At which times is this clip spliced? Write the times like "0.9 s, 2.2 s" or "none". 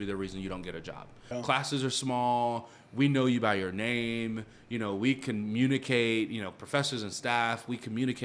1.2 s